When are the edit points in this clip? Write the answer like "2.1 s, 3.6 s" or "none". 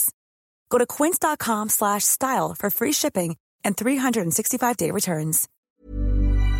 5.5 s